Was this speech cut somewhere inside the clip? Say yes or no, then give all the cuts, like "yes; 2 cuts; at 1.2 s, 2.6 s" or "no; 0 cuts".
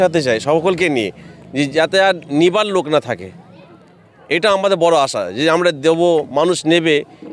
no; 0 cuts